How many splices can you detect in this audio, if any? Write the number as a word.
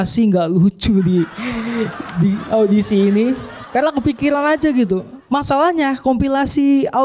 one